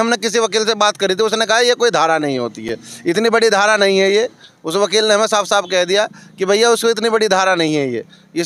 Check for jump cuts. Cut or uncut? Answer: uncut